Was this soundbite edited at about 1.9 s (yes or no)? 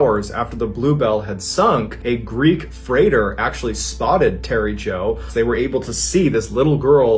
yes